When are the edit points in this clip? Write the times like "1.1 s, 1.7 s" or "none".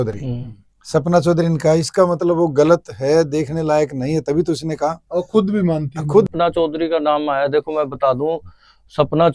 6.3 s